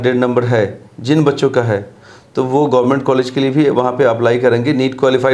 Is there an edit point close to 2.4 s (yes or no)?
no